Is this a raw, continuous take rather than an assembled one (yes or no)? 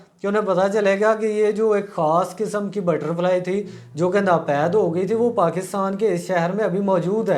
yes